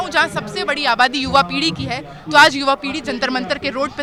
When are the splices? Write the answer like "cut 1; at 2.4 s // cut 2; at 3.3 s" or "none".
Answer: none